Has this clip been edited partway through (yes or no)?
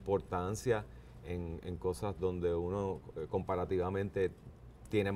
no